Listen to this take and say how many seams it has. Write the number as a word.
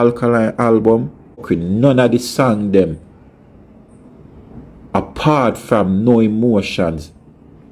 one